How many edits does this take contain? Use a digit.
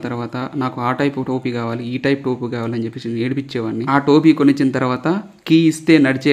0